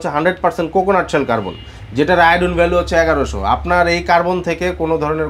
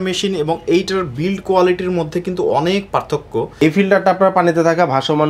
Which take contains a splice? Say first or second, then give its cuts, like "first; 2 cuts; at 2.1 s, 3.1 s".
second; 1 cut; at 3.5 s